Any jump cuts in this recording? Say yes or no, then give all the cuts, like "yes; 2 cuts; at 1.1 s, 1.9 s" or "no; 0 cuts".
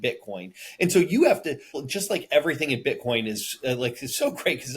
yes; 1 cut; at 1.7 s